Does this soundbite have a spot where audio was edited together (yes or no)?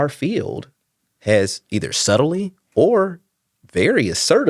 no